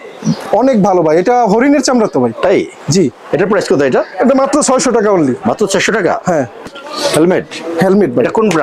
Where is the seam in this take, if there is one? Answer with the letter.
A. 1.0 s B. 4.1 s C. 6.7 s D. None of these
C